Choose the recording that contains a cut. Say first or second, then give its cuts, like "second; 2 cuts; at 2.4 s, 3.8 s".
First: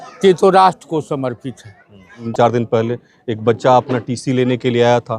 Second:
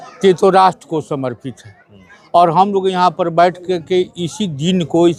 first; 1 cut; at 2.3 s